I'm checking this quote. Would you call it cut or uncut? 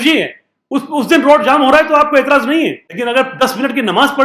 cut